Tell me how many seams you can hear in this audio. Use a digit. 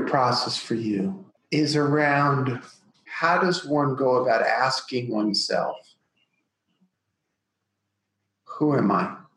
2